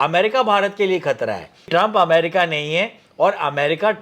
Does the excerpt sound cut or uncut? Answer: cut